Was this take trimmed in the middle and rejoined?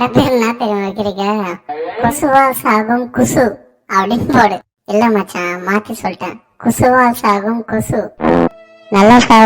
yes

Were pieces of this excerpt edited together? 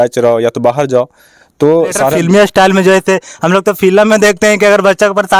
yes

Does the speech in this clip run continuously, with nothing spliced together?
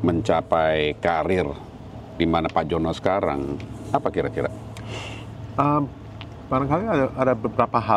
yes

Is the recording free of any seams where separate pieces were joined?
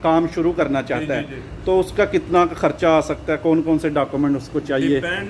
yes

